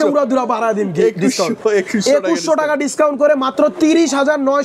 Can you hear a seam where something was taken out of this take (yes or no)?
no